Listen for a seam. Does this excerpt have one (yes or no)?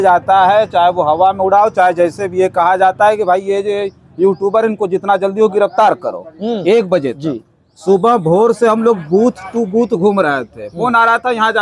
no